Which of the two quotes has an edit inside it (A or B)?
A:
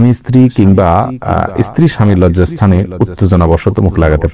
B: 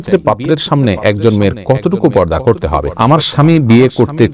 B